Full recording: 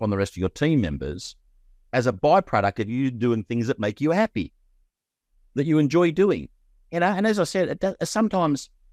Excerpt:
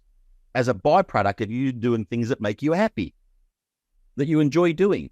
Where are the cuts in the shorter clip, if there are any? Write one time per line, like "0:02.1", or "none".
none